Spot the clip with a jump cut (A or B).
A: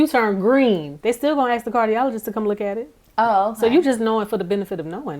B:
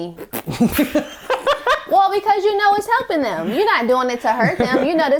A